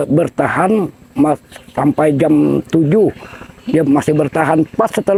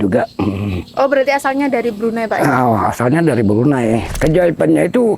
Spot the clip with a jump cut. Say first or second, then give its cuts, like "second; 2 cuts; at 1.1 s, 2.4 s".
second; 1 cut; at 4.1 s